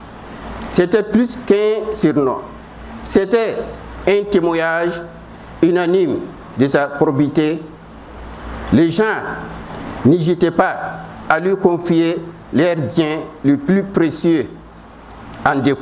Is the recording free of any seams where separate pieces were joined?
yes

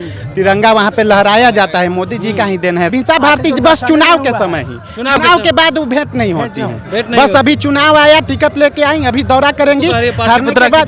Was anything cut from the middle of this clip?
yes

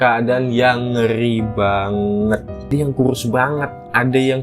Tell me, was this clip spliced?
yes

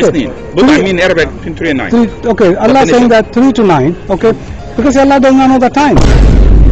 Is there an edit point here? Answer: yes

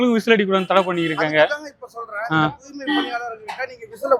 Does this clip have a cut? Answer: no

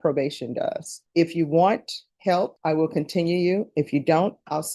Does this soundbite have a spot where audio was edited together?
yes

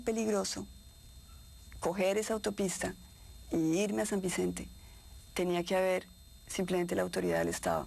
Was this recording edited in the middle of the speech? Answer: yes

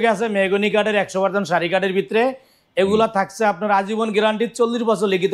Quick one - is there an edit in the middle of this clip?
no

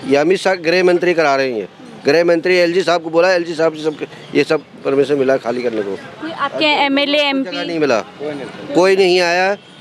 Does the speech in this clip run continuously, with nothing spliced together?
yes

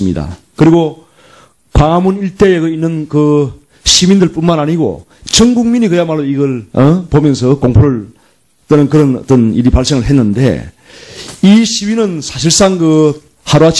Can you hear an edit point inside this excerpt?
yes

